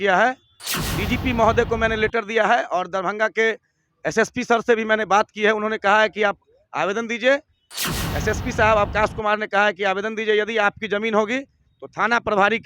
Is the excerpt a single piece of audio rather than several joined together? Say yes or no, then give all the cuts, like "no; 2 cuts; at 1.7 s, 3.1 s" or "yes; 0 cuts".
yes; 0 cuts